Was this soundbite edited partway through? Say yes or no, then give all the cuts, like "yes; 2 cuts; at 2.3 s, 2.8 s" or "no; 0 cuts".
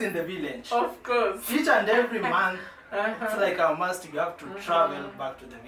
no; 0 cuts